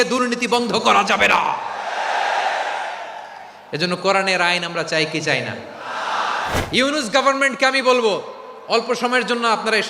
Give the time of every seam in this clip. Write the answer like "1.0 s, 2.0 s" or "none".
6.6 s